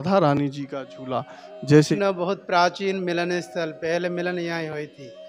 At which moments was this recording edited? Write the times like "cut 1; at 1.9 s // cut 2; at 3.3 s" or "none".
cut 1; at 1.9 s